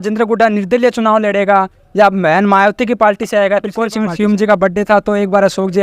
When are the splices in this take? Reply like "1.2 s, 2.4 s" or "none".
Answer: 4.0 s